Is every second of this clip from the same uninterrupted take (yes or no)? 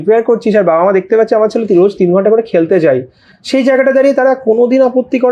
yes